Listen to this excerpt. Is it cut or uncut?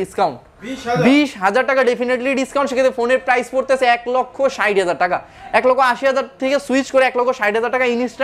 uncut